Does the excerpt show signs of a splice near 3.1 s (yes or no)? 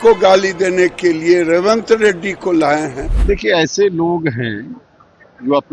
yes